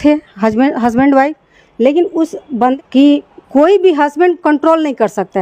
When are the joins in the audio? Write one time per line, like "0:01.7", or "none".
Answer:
0:02.7